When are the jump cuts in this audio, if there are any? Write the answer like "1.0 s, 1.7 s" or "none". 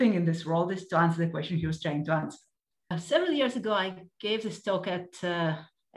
3.0 s